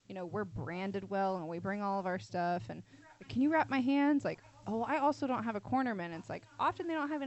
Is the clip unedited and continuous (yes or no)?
yes